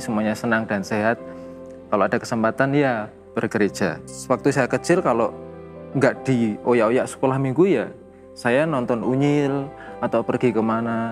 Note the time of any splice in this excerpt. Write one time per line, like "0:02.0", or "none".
0:04.1